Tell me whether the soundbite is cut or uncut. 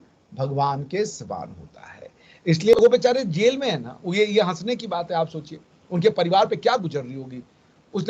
cut